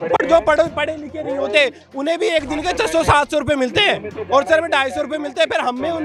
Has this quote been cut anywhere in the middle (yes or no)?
no